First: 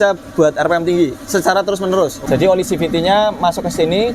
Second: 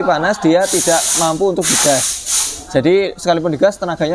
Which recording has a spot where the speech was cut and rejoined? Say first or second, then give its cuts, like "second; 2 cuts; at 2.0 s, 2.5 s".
first; 1 cut; at 2.2 s